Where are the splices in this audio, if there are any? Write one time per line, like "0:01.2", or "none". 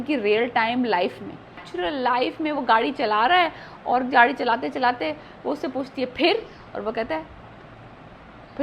0:01.7